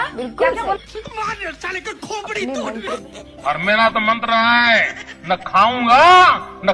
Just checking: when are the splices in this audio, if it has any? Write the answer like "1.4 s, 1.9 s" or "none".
2.9 s